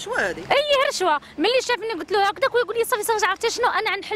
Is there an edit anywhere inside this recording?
no; 0 cuts

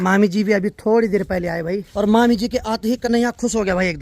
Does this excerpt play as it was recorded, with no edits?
no; 1 cut; at 1.9 s

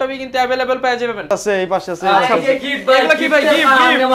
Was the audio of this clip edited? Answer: yes; 1 cut; at 1.2 s

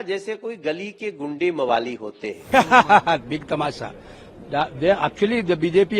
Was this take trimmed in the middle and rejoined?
yes; 1 cut; at 2.3 s

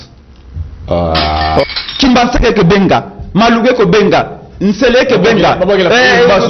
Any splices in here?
yes; 1 cut; at 1.6 s

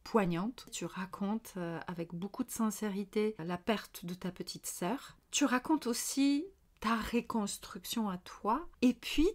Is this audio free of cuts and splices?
no; 2 cuts; at 5.2 s, 6.6 s

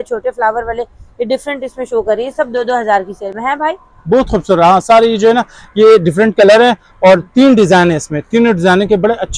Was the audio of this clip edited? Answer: no; 0 cuts

